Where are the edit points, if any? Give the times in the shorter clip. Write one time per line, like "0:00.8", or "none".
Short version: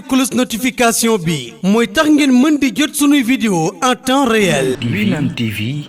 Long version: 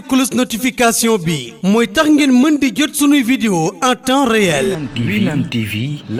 0:04.8